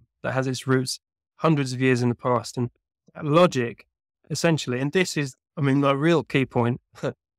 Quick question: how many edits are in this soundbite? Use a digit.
0